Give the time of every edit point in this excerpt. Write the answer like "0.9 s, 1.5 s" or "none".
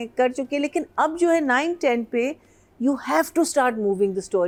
none